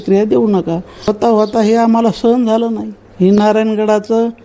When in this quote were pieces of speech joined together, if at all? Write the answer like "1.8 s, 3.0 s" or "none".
1.1 s